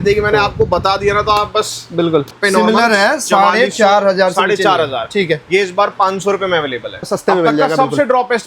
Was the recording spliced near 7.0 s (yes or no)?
yes